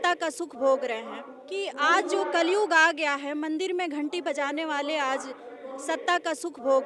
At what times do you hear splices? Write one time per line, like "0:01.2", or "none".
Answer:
none

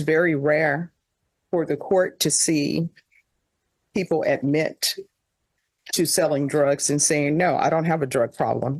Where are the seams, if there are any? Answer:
none

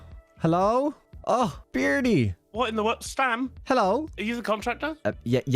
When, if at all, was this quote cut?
0:01.1
0:04.1

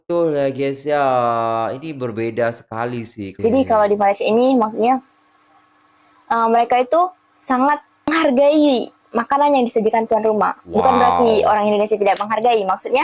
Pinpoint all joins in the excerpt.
0:03.2

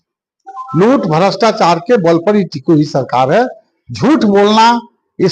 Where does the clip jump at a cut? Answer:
none

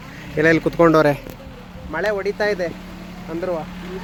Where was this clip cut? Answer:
none

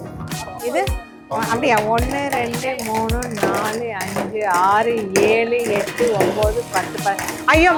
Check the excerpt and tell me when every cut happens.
none

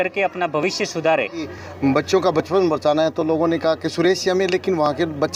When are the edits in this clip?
0:01.6

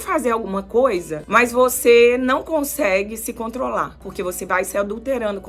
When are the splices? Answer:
0:01.2
0:04.0

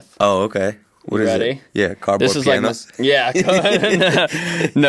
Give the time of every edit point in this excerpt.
none

